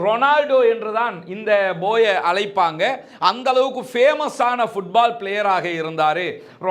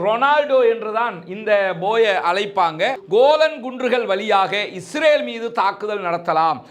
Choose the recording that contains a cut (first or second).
second